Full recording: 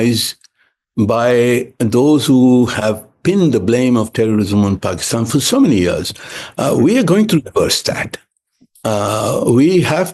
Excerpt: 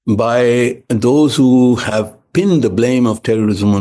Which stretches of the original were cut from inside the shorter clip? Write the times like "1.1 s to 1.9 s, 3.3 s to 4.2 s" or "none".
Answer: none